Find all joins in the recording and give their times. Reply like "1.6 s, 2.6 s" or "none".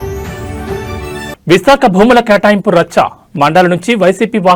none

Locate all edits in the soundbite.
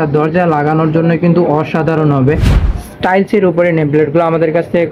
2.5 s

